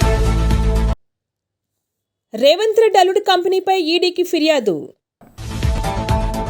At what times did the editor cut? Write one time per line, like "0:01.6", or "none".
none